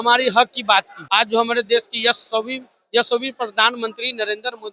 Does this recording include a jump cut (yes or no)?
yes